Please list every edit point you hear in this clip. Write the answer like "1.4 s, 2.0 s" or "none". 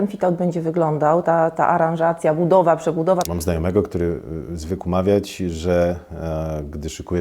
3.3 s